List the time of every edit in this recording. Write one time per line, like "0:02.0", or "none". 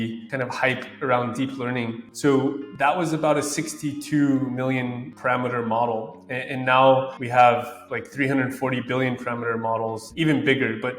0:10.1